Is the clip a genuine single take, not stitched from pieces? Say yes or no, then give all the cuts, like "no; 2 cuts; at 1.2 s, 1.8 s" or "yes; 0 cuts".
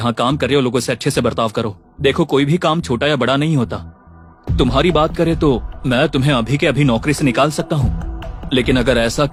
yes; 0 cuts